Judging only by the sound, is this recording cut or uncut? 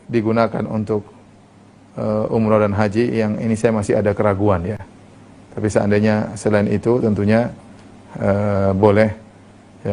uncut